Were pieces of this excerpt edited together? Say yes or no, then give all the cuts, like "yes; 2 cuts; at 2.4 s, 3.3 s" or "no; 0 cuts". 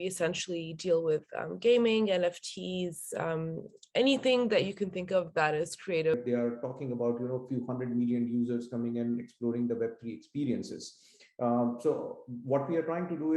yes; 1 cut; at 6.1 s